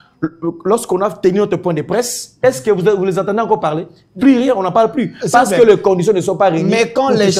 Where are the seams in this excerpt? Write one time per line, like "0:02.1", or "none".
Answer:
none